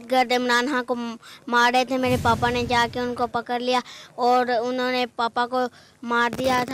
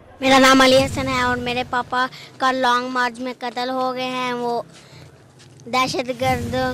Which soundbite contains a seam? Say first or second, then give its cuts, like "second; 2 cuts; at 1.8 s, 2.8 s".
second; 2 cuts; at 0.9 s, 1.7 s